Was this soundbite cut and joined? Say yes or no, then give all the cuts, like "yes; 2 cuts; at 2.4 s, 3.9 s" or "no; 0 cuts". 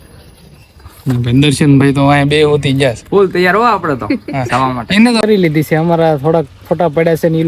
yes; 1 cut; at 5.2 s